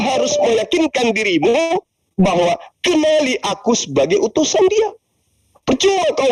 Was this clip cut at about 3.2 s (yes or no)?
no